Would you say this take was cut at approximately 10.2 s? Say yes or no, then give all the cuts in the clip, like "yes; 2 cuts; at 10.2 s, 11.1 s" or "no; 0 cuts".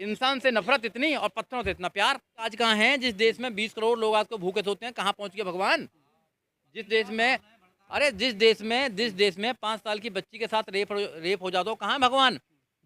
no; 1 cut; at 2.5 s